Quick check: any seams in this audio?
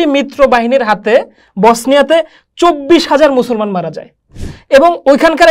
no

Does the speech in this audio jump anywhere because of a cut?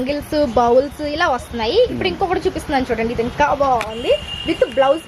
no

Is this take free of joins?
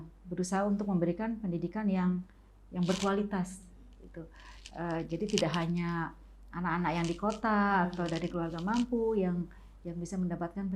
yes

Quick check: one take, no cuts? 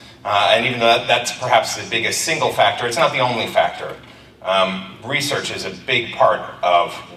yes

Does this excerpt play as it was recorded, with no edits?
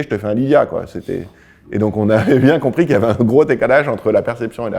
yes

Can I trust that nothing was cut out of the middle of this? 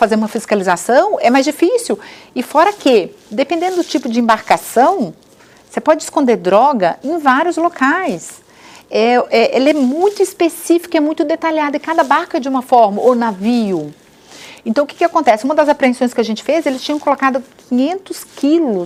yes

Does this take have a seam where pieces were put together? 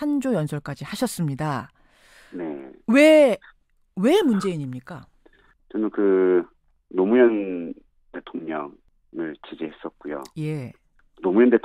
no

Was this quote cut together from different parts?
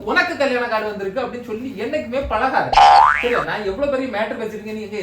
yes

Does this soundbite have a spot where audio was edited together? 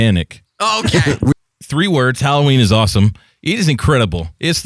yes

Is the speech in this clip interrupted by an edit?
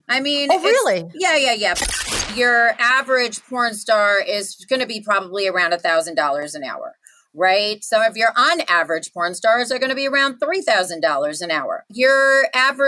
yes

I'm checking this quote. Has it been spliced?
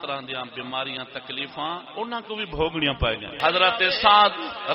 yes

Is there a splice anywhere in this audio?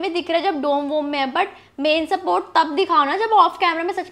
no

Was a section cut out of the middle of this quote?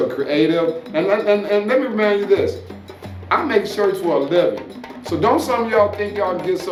no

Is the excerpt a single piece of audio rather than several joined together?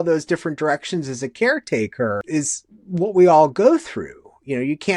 no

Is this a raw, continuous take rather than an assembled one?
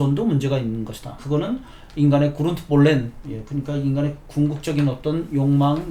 no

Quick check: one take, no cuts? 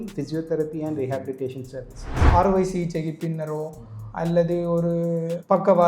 no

